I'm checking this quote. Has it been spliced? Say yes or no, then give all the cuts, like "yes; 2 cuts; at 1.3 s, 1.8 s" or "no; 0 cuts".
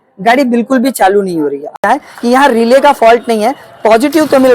yes; 1 cut; at 1.8 s